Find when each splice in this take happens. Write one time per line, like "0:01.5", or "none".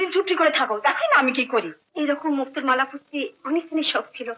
0:01.8